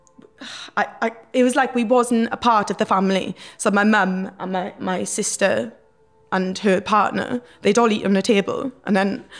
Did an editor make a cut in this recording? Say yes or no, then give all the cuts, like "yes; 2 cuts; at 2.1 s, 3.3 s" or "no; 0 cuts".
no; 0 cuts